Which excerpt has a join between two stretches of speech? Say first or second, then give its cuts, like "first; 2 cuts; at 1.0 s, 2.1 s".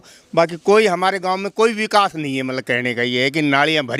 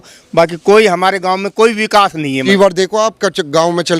second; 1 cut; at 2.5 s